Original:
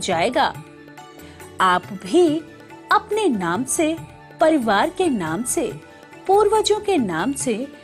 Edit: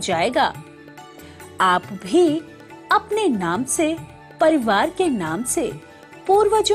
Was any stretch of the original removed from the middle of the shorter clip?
no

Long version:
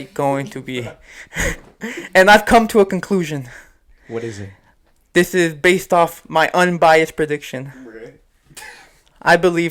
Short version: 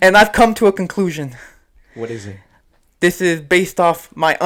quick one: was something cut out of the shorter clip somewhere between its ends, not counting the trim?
no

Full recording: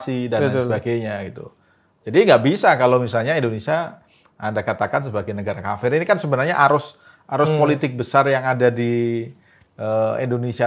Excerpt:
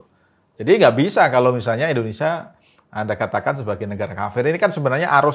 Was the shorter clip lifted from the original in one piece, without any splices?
yes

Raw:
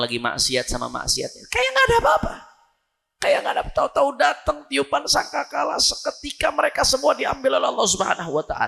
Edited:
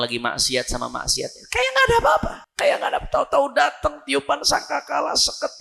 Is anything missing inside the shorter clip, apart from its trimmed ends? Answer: yes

